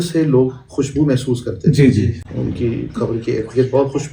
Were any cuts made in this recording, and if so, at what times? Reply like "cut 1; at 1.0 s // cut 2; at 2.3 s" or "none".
none